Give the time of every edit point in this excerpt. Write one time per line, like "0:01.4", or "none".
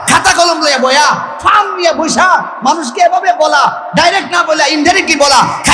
none